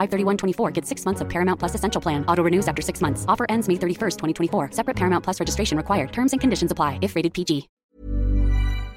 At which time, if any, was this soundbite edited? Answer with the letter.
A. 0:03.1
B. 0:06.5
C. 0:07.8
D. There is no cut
C